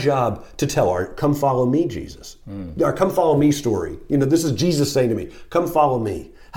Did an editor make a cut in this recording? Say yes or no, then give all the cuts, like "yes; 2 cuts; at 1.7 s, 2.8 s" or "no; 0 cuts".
no; 0 cuts